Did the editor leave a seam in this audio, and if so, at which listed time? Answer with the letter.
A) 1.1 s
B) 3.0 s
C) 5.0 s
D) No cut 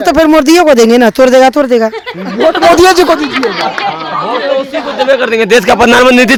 D